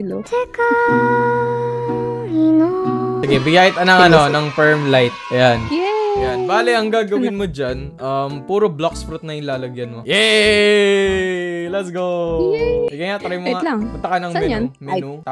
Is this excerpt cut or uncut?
cut